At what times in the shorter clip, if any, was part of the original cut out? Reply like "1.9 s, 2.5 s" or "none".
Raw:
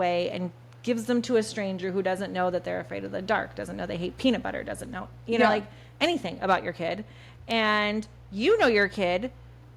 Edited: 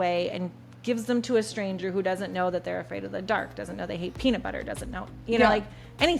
none

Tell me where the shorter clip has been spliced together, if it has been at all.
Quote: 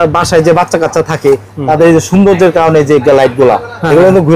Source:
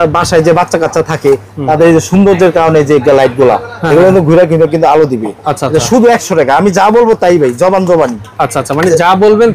none

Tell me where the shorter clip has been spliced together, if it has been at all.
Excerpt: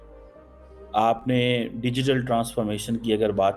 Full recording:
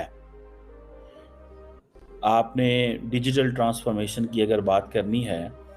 0.9 s

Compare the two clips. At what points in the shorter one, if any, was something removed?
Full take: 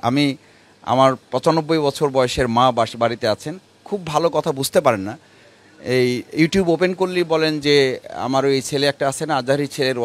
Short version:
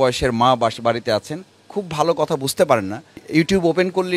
3.2 s

